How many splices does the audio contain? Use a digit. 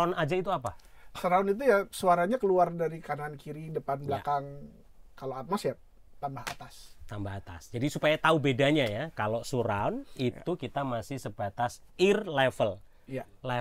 0